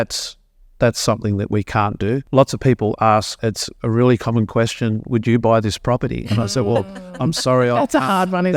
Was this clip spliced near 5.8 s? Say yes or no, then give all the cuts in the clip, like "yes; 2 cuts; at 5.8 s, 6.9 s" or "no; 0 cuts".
no; 1 cut; at 3.3 s